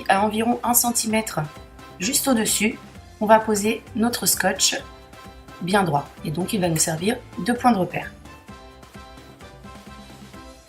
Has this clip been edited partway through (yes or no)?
yes